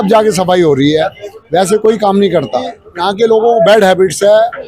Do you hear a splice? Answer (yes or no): yes